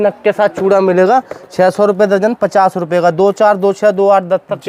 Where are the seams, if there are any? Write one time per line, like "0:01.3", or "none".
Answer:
none

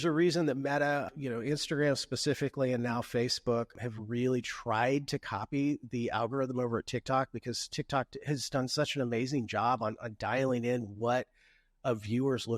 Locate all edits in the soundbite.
0:01.1
0:03.7

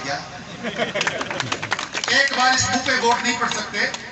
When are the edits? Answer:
none

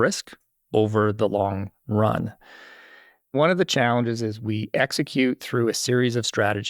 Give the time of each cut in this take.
0:01.1
0:03.3

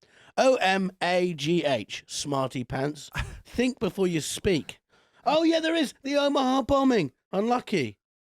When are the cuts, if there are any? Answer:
0:07.2

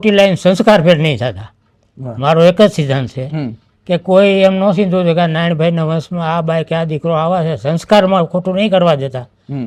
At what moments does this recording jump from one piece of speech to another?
none

